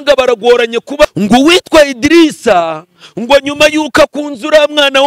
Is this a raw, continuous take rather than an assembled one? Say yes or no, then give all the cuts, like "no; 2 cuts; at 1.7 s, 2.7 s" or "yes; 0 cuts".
no; 1 cut; at 1.1 s